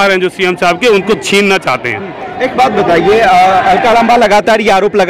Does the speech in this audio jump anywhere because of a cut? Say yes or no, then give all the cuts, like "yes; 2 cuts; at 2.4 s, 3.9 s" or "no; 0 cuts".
no; 0 cuts